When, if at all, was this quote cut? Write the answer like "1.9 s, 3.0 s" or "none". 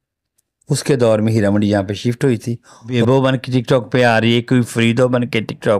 2.9 s